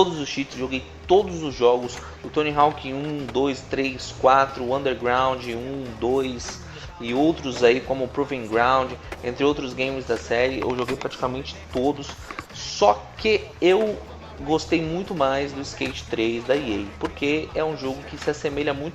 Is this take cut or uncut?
cut